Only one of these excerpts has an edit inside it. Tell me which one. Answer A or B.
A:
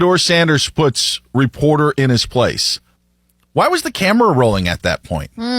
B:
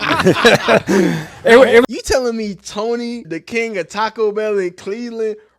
B